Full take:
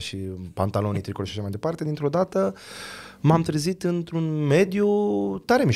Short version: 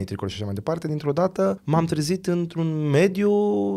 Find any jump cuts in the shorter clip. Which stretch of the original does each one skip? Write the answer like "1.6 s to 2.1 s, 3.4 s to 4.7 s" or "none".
2.6 s to 3.2 s

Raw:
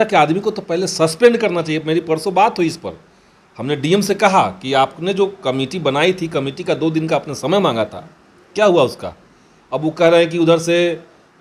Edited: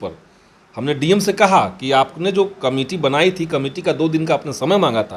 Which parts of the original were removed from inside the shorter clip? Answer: none

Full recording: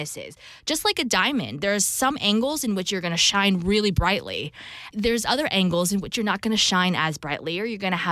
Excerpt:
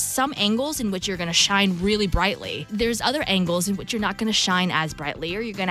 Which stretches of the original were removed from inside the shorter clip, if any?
4.0 s to 4.4 s

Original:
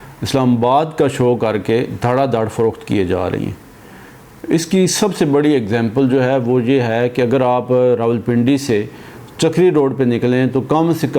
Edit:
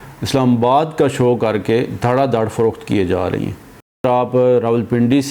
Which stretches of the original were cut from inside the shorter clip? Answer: 4.0 s to 7.4 s

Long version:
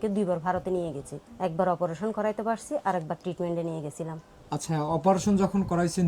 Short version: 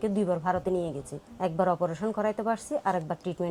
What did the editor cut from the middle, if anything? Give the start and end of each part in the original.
none

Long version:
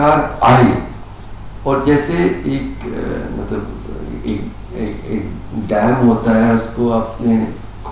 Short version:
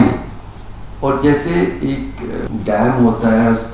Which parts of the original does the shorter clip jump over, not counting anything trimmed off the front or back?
3.1 s to 5.5 s

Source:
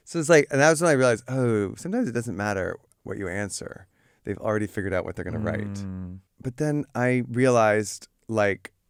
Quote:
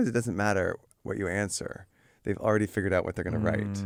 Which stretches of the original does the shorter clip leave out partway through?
none

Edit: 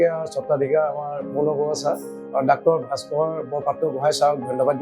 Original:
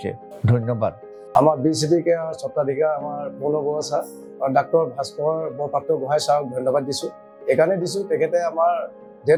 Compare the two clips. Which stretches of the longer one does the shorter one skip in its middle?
none

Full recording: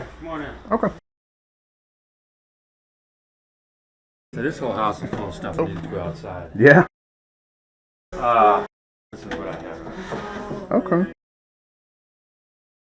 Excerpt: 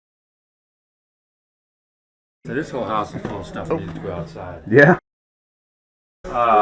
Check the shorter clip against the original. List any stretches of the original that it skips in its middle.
none

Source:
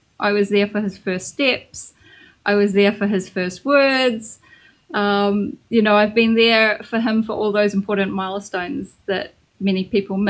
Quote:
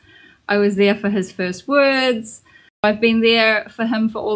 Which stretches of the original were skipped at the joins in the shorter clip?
4.8 s to 6.0 s

